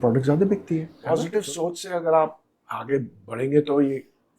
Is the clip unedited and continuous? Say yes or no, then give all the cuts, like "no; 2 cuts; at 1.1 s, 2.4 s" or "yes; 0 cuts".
no; 1 cut; at 0.9 s